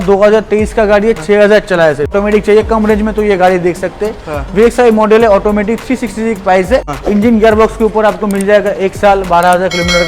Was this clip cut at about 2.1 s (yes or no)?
yes